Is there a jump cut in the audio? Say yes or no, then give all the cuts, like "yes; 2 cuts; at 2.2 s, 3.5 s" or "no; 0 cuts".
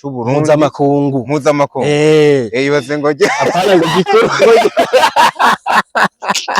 no; 0 cuts